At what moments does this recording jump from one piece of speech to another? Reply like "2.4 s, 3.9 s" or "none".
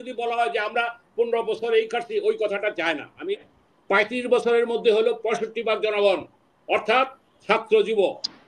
3.5 s